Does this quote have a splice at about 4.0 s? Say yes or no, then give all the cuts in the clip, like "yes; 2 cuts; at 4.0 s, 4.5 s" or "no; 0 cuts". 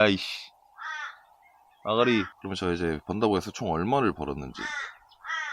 no; 1 cut; at 2.4 s